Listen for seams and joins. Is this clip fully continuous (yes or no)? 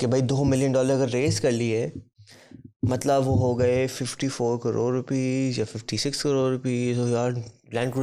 yes